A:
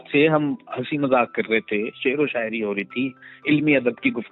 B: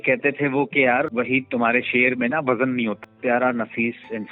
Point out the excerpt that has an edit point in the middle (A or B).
B